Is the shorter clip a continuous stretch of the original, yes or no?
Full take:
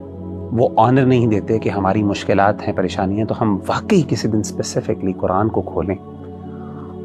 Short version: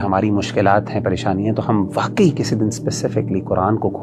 yes